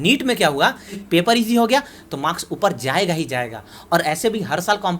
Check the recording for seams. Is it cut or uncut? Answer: cut